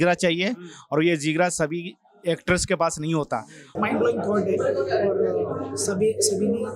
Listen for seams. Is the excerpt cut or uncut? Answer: cut